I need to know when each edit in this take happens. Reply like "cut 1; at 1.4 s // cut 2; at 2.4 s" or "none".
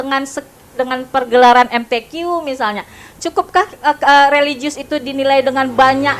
none